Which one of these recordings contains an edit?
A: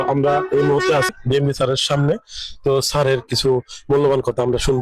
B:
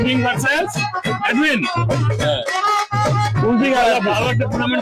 A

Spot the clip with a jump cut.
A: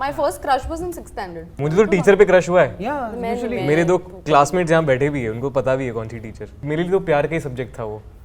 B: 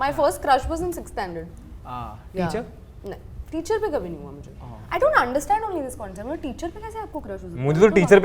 A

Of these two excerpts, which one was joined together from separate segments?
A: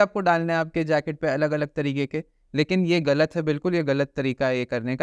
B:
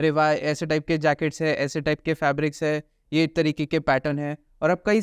B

